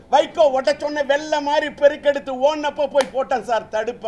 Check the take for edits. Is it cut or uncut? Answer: uncut